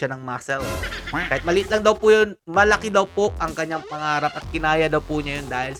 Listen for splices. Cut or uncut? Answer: uncut